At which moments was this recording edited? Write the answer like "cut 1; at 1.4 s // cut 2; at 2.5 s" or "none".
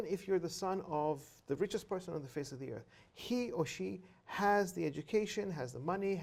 none